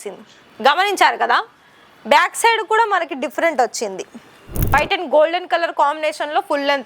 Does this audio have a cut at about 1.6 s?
no; 1 cut; at 4.7 s

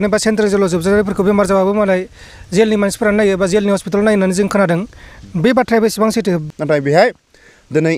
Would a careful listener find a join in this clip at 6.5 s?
yes; 1 cut; at 6.5 s

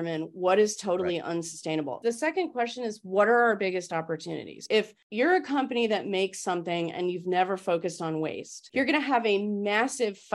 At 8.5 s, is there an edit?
no; 1 cut; at 1.9 s

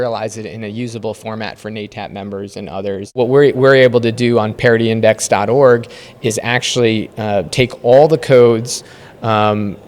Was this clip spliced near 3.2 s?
yes; 1 cut; at 3.2 s

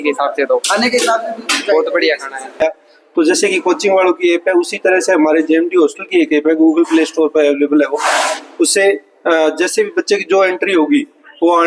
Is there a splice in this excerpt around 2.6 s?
yes; 1 cut; at 2.6 s

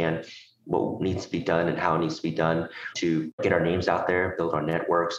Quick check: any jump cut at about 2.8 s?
yes; 1 cut; at 2.8 s

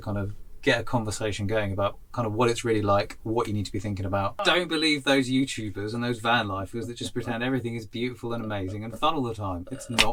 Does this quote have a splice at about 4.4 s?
yes; 1 cut; at 4.4 s

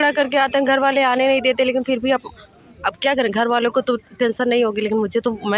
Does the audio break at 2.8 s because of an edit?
no; 0 cuts

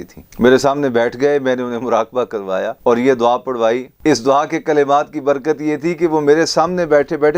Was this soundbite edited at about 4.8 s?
no; 0 cuts

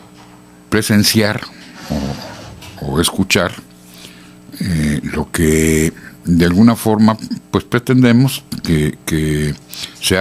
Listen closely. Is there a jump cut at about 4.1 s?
no; 1 cut; at 7.7 s

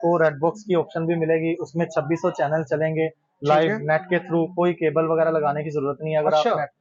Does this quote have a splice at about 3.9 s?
no; 0 cuts

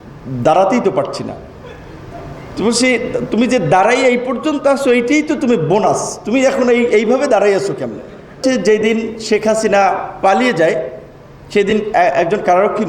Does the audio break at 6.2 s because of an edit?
no; 1 cut; at 8.4 s

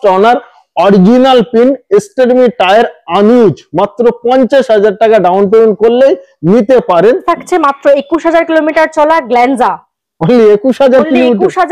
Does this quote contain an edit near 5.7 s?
no; 1 cut; at 7.3 s

